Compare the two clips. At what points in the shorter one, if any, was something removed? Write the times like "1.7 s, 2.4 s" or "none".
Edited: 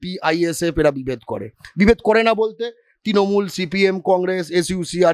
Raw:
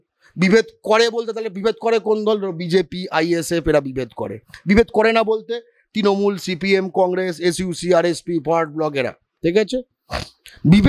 none